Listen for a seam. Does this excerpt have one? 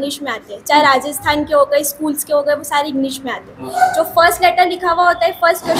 no; 0 cuts

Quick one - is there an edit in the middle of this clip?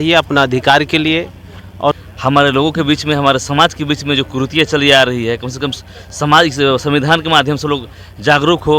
yes; 1 cut; at 2.0 s

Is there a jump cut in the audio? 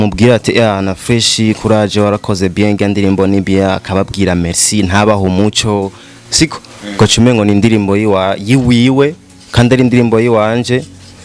no; 0 cuts

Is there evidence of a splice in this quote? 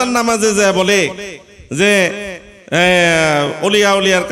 no; 0 cuts

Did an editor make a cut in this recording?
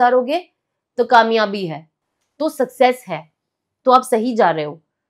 no; 0 cuts

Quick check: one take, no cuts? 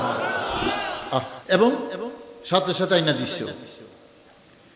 no; 1 cut; at 1.3 s

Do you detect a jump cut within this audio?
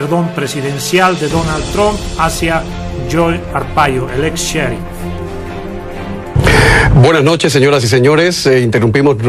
no; 0 cuts

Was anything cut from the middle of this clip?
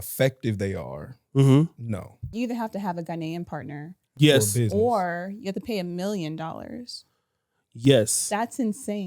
yes; 1 cut; at 2.3 s

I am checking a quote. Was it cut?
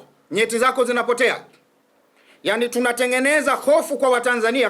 no; 0 cuts

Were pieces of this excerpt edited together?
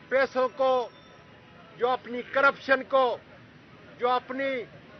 no; 0 cuts

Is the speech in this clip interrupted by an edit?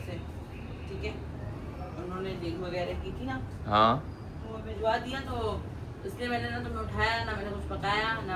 no; 0 cuts

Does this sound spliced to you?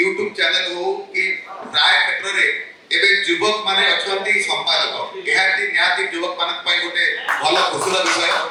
no; 0 cuts

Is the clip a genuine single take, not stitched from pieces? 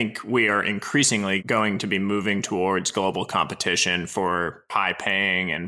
no; 2 cuts; at 1.4 s, 4.7 s

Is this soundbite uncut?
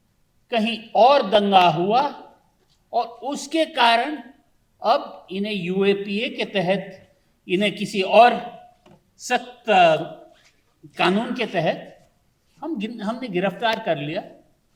yes; 0 cuts

